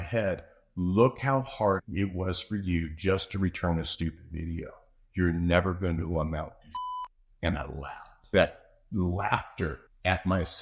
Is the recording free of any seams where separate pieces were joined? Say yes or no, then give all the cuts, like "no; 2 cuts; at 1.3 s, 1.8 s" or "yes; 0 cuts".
no; 1 cut; at 8.3 s